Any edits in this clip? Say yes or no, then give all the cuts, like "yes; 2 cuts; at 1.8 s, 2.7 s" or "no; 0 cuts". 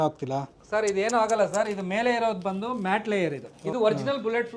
yes; 1 cut; at 3.6 s